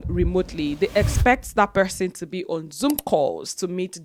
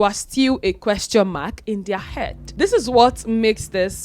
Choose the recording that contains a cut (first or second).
second